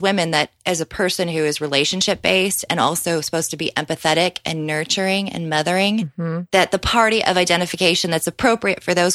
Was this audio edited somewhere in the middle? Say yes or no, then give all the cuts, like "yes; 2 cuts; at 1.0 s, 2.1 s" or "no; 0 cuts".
no; 0 cuts